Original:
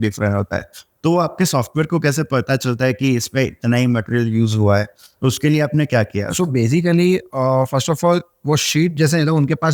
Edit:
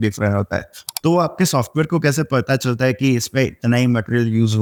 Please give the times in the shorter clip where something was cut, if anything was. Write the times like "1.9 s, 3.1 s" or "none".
none

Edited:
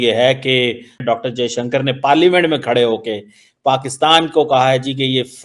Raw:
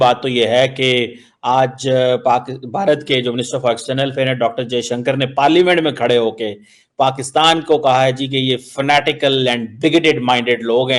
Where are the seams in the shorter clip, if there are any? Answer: 1.0 s

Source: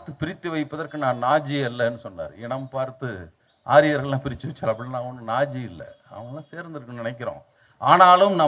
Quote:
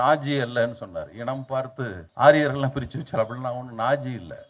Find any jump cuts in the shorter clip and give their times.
2.0 s

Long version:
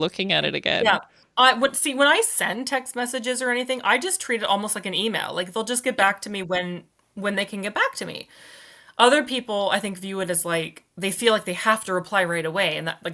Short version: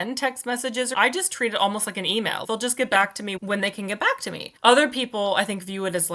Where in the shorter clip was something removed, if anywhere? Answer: 0.9 s, 2.4 s, 3.4 s, 4.5 s

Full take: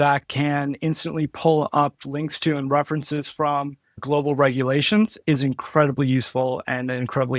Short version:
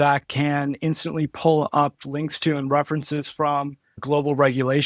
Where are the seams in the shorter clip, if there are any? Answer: none

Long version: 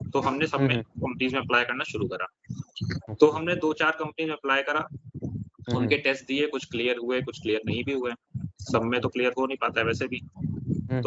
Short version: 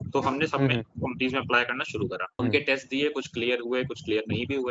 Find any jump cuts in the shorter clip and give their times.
2.4 s

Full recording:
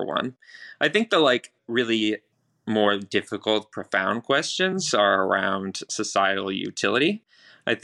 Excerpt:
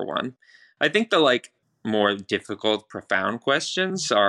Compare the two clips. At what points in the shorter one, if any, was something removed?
1.6 s

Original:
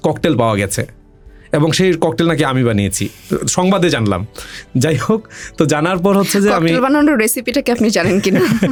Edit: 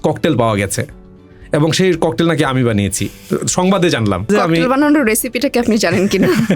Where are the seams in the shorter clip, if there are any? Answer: 4.3 s

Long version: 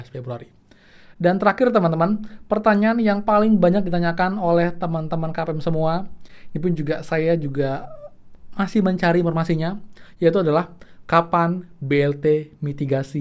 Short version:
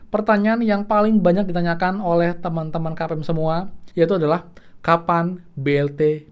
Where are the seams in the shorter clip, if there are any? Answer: 3.8 s

